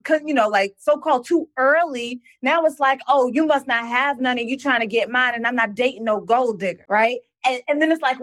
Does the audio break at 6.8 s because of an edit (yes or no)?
yes